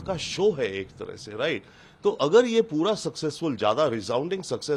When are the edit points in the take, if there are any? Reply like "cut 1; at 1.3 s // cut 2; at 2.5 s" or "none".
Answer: none